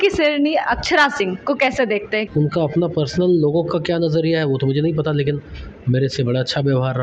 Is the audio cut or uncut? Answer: cut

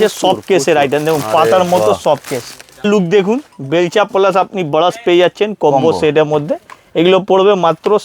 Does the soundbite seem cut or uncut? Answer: cut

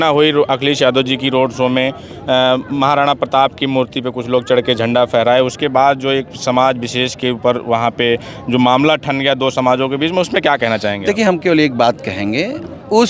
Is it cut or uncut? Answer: uncut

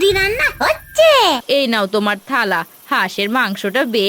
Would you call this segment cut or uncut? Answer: cut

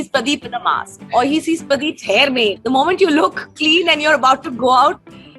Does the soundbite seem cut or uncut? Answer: cut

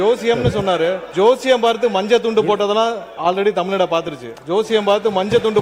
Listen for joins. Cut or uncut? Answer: cut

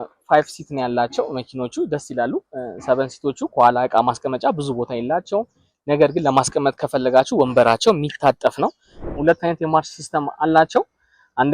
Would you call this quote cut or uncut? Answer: cut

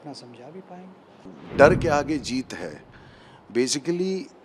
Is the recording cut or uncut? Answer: cut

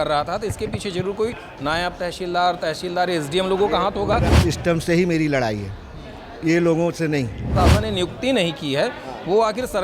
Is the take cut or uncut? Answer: cut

